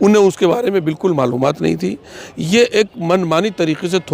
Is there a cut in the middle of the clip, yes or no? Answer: no